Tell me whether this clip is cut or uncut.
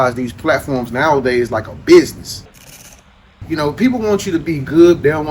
cut